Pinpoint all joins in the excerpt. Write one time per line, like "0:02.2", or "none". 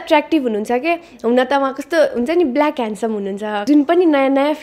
0:03.6